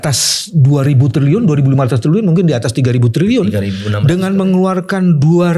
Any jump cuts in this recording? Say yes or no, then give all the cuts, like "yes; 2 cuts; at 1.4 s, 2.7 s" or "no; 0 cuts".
no; 0 cuts